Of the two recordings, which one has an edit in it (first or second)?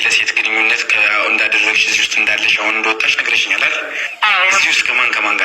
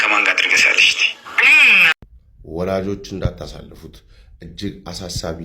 second